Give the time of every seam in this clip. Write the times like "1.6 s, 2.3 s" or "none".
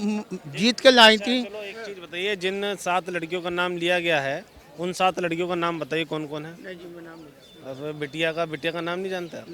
none